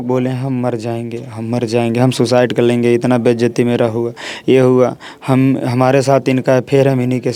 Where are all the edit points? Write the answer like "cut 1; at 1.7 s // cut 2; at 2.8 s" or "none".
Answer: none